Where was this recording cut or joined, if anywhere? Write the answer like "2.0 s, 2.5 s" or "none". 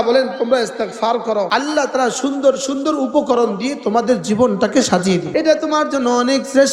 1.5 s, 5.3 s